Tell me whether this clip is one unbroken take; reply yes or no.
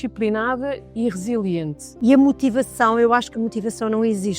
no